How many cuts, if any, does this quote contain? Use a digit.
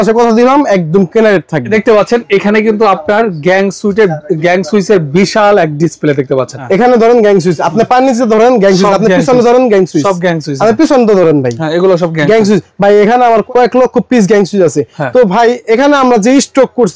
3